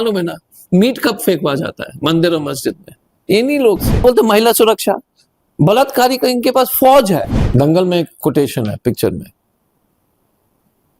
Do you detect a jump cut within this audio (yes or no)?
yes